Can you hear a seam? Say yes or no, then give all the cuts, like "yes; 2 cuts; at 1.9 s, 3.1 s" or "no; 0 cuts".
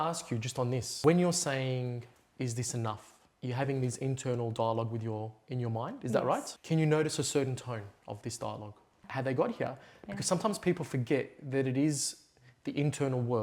yes; 3 cuts; at 0.9 s, 6.5 s, 9.0 s